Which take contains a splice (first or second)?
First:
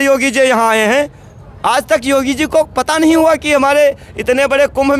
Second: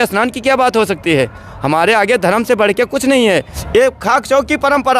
second